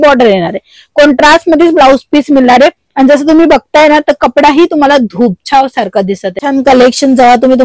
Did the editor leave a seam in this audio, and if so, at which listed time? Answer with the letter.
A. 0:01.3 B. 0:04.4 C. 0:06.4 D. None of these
C